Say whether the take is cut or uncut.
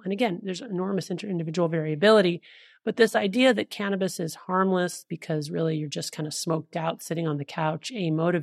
uncut